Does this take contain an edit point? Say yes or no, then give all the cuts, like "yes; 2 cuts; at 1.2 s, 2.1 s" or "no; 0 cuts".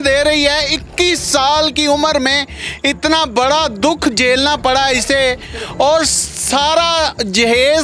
no; 0 cuts